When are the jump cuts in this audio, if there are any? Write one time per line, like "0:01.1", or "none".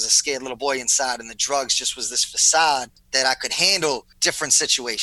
0:03.0
0:04.1

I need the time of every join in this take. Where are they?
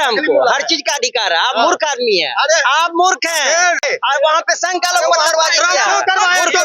0:03.8

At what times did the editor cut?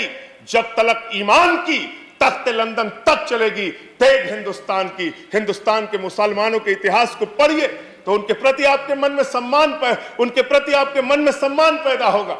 none

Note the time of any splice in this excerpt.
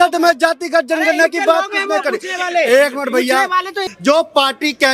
0:03.7

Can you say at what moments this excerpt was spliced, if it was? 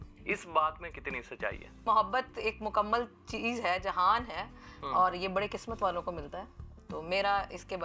none

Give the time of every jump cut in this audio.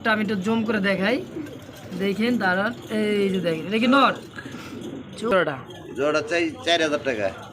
0:05.3

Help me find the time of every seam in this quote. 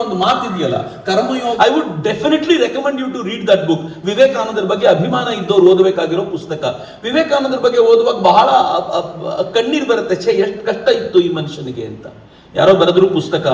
0:01.6

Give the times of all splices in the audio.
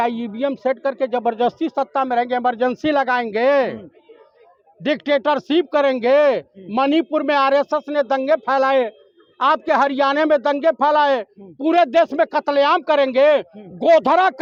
none

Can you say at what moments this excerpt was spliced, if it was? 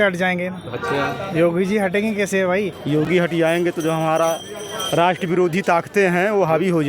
0:02.8

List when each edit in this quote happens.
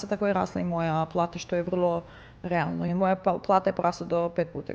0:02.9

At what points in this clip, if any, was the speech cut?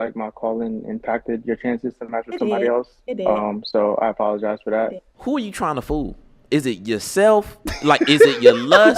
0:05.1

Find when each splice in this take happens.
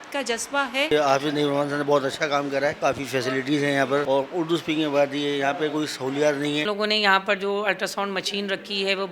0:00.9
0:02.8
0:04.0
0:06.6

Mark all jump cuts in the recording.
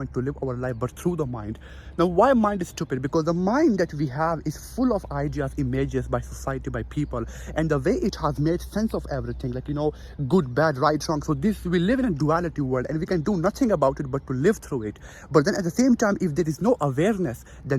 none

